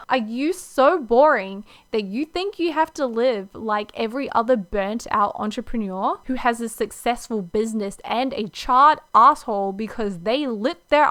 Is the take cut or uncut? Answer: uncut